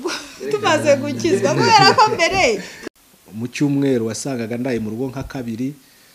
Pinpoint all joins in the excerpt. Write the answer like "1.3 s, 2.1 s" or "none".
2.8 s